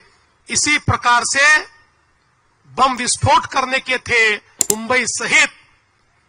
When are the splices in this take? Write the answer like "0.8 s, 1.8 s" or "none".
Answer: 4.6 s